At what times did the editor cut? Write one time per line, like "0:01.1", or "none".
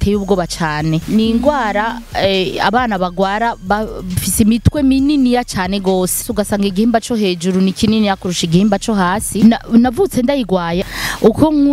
0:01.0
0:06.3
0:09.4
0:10.8